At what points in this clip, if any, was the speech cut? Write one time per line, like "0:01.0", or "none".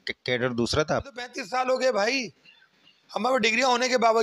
0:01.3